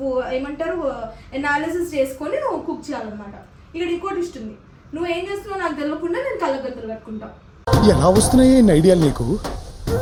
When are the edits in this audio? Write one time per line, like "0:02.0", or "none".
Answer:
none